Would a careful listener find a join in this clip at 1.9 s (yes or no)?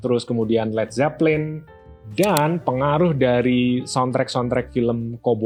no